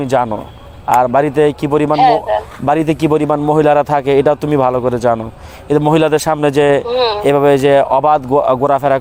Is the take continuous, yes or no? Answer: yes